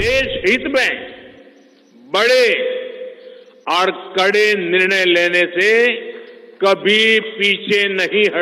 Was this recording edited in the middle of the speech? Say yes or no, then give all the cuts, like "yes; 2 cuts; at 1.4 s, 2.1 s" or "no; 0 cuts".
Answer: no; 0 cuts